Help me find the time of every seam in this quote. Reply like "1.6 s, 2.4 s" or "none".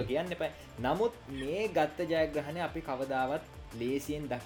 none